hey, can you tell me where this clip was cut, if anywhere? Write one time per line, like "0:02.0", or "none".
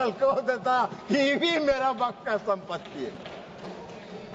none